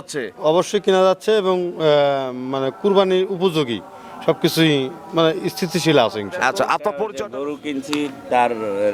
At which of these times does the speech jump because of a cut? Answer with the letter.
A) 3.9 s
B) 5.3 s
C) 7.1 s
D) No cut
C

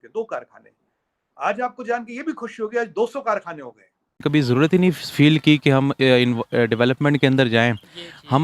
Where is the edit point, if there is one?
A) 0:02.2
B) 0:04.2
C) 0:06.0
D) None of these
B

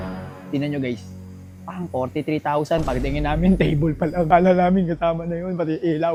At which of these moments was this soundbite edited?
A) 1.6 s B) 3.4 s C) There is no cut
C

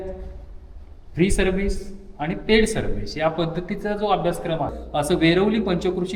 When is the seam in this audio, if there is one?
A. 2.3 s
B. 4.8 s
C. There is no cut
B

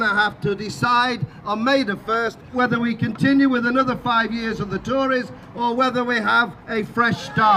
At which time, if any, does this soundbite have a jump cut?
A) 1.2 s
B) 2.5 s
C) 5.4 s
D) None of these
B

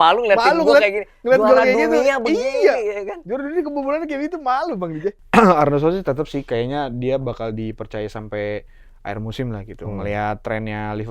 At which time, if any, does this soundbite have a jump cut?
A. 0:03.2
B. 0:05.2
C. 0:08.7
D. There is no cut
B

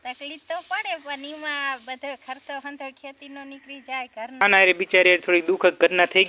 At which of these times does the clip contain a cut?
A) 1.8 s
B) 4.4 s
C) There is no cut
B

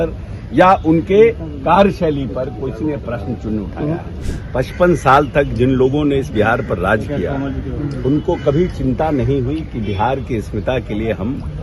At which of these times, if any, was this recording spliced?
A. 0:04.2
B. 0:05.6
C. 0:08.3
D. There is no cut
A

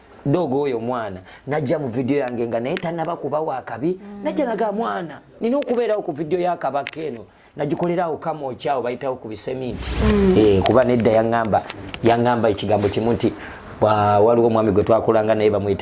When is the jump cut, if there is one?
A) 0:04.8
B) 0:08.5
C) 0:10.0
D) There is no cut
C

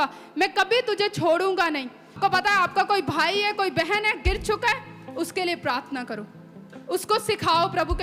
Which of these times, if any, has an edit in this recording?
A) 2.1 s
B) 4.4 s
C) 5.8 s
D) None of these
A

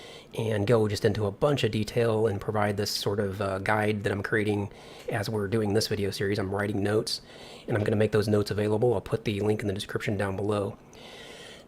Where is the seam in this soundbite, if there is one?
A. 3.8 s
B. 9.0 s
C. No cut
A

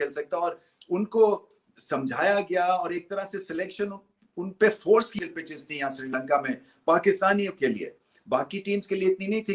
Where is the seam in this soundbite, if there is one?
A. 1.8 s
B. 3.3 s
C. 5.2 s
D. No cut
C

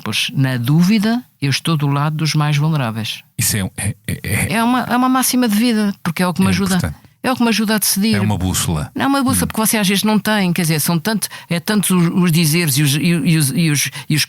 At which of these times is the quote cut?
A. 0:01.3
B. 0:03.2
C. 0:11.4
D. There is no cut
B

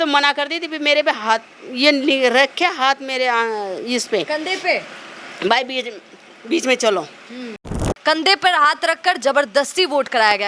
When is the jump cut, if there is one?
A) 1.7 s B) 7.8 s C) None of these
B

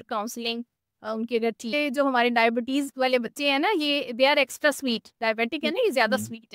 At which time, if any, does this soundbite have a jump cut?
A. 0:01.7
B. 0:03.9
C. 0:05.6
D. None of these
A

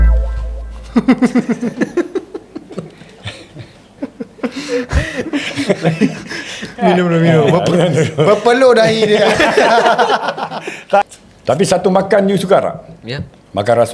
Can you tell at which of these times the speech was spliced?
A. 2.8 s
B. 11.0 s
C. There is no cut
B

